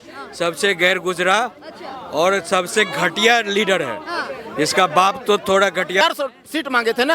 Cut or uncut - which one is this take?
cut